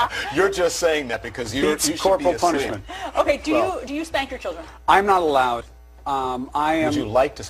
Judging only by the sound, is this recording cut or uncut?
uncut